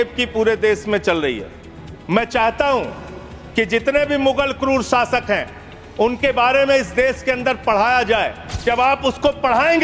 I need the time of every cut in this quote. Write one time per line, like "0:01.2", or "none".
0:08.6